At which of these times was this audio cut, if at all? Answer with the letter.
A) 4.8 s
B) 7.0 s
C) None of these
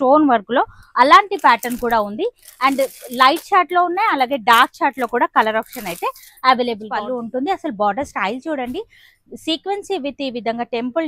B